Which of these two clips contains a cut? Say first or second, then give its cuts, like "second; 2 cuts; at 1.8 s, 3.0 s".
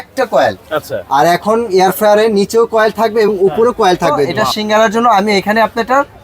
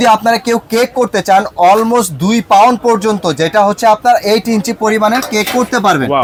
first; 1 cut; at 4.4 s